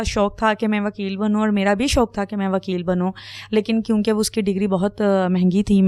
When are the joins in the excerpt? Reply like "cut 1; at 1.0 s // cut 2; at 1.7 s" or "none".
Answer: none

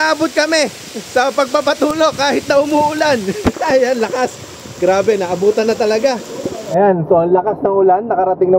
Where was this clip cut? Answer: cut 1; at 6.6 s

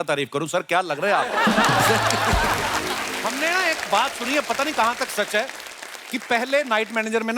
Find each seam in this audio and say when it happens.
cut 1; at 3.2 s

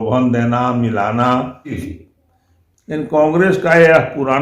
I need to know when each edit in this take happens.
cut 1; at 1.9 s

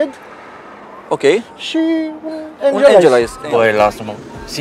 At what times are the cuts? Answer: cut 1; at 3.4 s

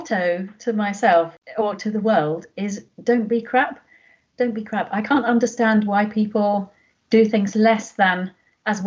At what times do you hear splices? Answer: none

